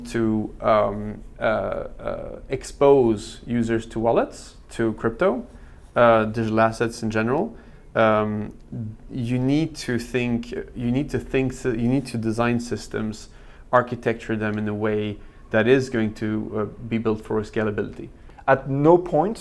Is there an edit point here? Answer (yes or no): yes